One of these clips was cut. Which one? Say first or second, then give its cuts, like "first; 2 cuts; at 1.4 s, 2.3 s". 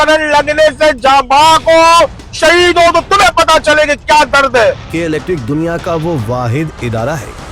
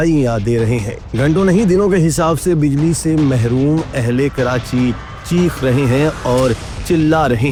first; 1 cut; at 4.9 s